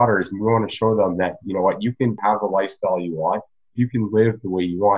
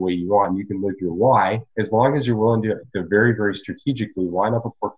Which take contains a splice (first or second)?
second